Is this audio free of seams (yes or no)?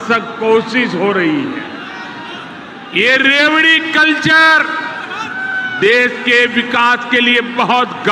yes